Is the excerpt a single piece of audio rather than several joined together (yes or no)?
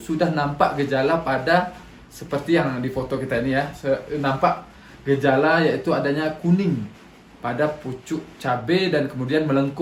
yes